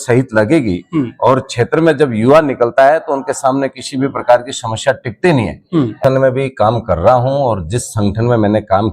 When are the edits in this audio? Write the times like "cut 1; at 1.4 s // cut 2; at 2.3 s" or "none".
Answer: cut 1; at 6.0 s